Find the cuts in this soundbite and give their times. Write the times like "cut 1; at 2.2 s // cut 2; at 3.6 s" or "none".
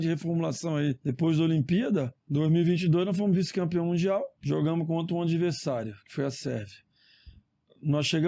cut 1; at 1.0 s // cut 2; at 2.2 s // cut 3; at 4.3 s

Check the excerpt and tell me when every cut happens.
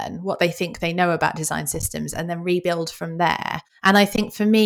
cut 1; at 3.7 s

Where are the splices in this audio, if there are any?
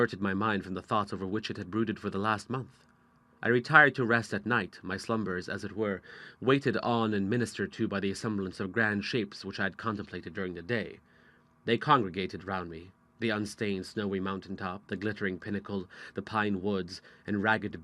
cut 1; at 5.6 s

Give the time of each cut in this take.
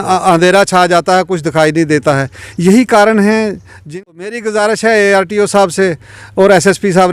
cut 1; at 3.7 s

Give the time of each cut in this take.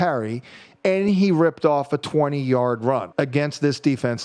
cut 1; at 3.1 s

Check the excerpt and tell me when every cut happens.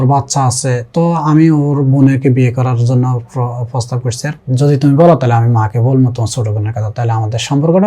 cut 1; at 4.4 s

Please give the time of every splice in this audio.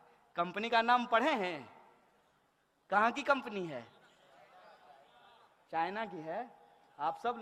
none

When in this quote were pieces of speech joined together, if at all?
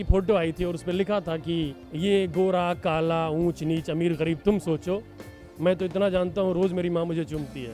cut 1; at 1.8 s

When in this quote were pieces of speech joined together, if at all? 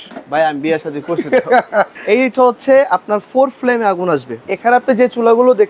cut 1; at 2.0 s // cut 2; at 4.5 s

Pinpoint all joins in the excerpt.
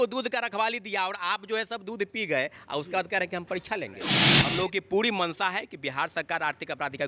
cut 1; at 4.2 s

